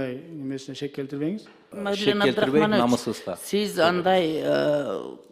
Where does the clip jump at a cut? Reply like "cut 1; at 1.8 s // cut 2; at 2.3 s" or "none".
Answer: cut 1; at 1.6 s